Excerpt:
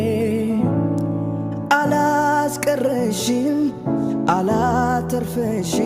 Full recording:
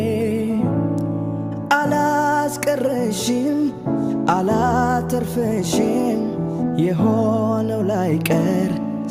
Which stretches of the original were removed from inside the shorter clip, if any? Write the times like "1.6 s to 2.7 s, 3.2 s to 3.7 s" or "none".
none